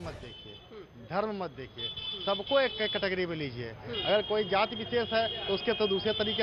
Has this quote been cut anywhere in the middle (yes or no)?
no